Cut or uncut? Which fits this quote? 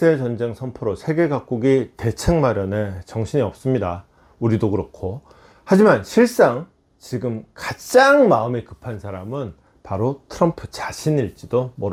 uncut